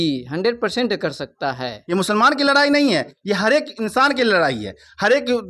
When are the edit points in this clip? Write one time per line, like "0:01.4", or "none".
0:01.8